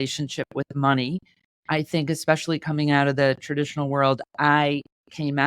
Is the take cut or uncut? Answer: uncut